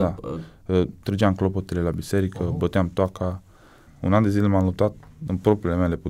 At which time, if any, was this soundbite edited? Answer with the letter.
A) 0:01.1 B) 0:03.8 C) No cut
B